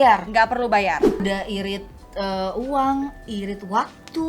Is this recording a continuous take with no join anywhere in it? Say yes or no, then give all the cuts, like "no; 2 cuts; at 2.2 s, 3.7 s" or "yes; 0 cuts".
no; 1 cut; at 1.2 s